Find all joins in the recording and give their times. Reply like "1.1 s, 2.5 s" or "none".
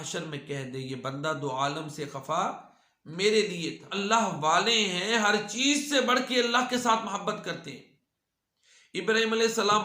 3.9 s